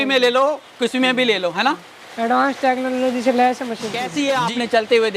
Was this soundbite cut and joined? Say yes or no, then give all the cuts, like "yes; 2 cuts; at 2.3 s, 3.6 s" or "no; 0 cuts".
yes; 1 cut; at 4.0 s